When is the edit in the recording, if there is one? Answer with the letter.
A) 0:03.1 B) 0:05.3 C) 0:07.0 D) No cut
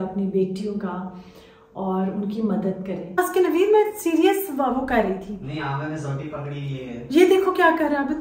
A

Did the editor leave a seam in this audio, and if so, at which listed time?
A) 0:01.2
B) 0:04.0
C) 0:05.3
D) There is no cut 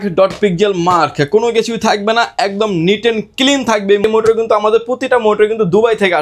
B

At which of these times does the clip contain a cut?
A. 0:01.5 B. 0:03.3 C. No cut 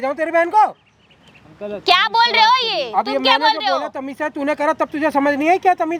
C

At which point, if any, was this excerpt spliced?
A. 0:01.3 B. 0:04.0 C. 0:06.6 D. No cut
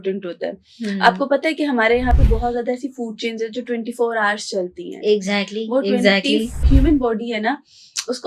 C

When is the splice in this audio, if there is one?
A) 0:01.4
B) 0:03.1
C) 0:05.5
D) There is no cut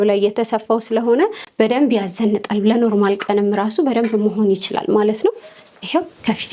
A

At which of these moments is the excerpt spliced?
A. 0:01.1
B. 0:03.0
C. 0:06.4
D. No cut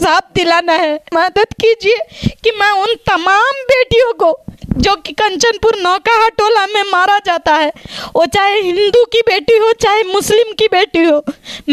A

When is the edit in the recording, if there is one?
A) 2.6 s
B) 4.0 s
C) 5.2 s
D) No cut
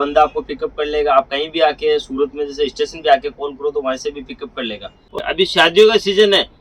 C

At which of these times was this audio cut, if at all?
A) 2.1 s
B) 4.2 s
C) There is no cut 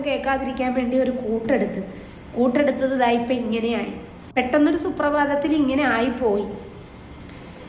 B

